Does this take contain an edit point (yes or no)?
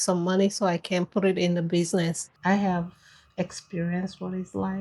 yes